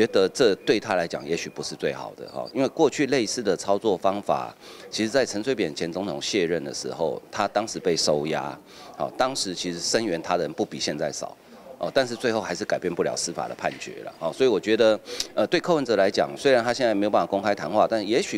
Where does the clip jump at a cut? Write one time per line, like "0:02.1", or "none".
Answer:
none